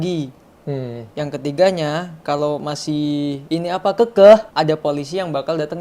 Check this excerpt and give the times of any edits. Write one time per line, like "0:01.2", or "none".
0:03.4
0:04.5